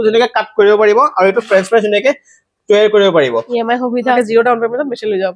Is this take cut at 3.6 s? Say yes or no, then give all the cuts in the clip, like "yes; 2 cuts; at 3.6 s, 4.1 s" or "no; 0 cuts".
yes; 1 cut; at 3.6 s